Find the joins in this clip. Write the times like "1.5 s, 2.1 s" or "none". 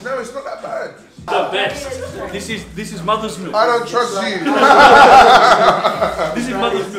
none